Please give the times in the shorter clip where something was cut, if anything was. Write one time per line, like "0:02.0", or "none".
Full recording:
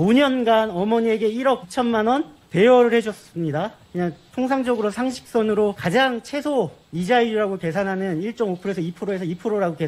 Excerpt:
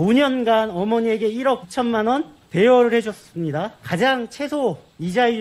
0:03.9